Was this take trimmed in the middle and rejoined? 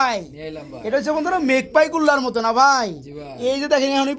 no; 0 cuts

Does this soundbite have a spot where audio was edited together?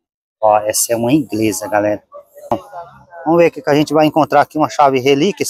yes; 1 cut; at 2.5 s

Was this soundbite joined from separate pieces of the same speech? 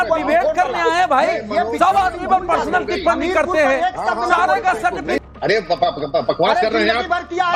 yes; 1 cut; at 5.2 s

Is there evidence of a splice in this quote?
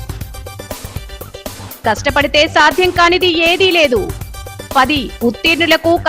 yes; 1 cut; at 1.7 s

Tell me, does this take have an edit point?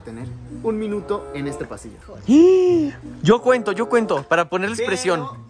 no; 0 cuts

